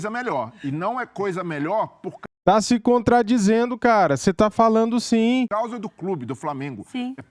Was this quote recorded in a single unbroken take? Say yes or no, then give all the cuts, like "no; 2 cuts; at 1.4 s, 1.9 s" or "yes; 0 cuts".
no; 1 cut; at 5.5 s